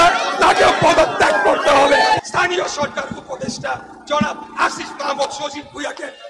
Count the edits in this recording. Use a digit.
1